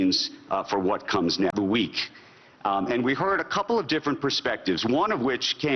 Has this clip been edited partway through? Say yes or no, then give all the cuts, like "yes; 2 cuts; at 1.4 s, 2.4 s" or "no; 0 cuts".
yes; 1 cut; at 1.5 s